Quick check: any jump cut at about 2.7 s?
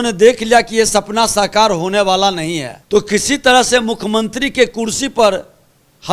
yes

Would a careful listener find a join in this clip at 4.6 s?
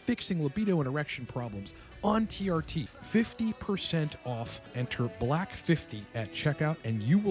yes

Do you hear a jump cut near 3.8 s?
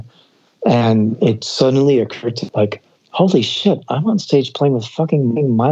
no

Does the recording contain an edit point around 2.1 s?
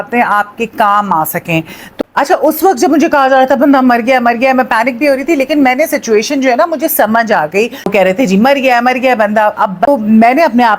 yes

